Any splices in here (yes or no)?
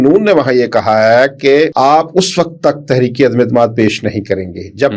yes